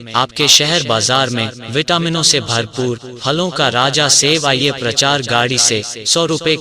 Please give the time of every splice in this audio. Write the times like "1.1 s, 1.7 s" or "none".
2.9 s